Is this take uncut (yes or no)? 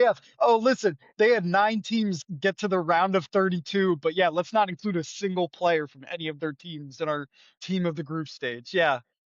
no